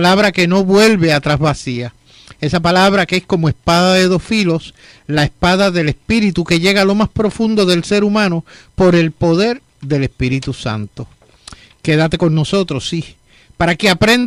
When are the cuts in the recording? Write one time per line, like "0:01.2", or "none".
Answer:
none